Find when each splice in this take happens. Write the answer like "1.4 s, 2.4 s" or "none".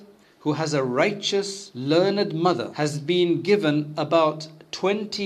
1.6 s, 2.7 s